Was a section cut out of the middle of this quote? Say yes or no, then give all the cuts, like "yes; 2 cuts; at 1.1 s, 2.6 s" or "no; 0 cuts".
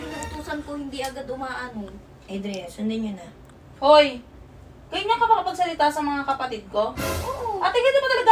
no; 0 cuts